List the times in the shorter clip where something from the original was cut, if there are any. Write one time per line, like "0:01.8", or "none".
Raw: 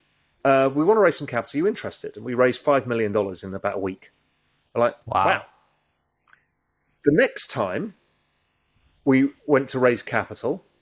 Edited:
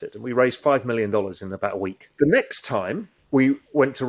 0:02.0
0:03.1